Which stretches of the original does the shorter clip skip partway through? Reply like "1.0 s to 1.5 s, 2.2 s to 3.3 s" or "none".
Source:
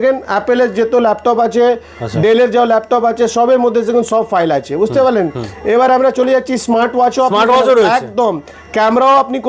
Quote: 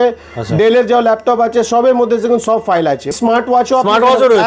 4.7 s to 6.5 s